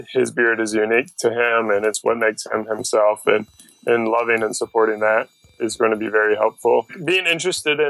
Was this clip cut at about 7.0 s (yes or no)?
yes